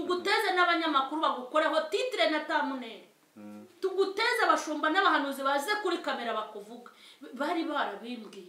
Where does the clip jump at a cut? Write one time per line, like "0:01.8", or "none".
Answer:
none